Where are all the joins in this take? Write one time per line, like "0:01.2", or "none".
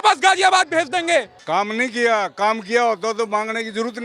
0:01.3